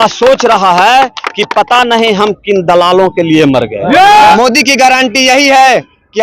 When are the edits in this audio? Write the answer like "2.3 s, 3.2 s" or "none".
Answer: 4.4 s